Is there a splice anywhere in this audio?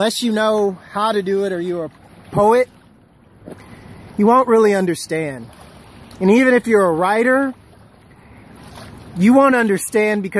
yes; 1 cut; at 1.1 s

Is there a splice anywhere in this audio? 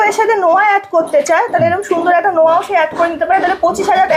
no; 0 cuts

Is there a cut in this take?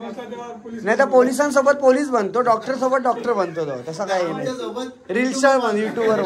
no; 0 cuts

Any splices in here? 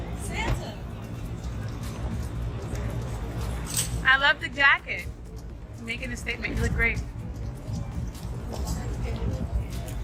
no; 0 cuts

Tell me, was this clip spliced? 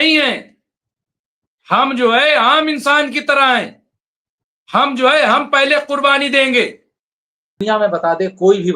yes; 1 cut; at 7.6 s

